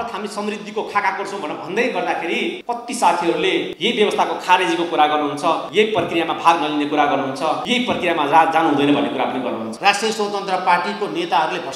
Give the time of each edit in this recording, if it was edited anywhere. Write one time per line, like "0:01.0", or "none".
0:02.6
0:03.7
0:05.6
0:07.6
0:09.7